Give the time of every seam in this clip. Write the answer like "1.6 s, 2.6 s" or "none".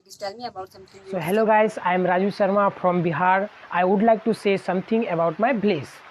1.1 s